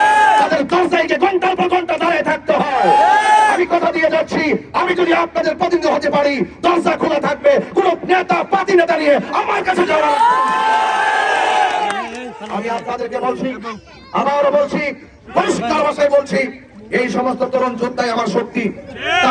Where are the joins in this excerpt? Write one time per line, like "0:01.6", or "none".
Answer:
none